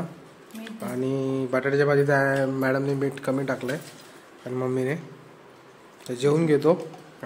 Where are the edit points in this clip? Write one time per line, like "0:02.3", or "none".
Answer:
none